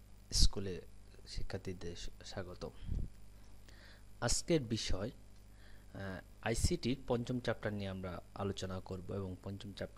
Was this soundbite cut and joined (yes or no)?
no